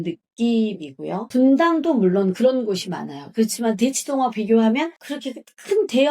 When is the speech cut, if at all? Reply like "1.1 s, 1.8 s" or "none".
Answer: 1.2 s